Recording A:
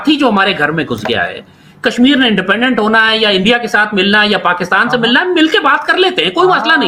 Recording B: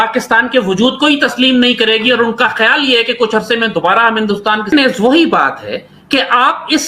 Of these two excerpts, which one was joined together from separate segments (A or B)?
B